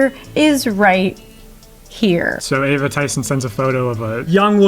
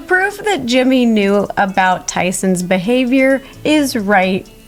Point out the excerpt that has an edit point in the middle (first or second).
first